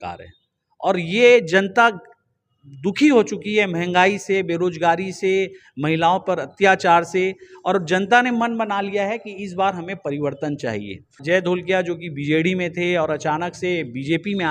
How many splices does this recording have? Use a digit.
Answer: 1